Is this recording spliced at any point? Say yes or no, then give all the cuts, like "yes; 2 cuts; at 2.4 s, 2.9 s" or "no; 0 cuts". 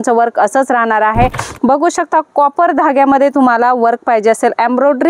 yes; 1 cut; at 1.4 s